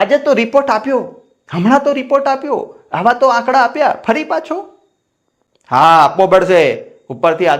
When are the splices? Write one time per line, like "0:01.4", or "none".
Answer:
none